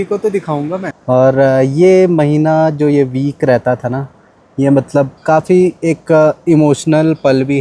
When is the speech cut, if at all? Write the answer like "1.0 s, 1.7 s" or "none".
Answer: 0.9 s